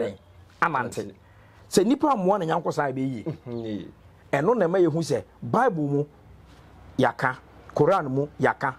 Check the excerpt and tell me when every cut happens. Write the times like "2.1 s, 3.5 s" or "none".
none